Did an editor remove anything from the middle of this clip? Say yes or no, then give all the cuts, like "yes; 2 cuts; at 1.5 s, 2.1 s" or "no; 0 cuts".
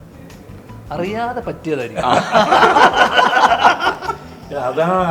no; 0 cuts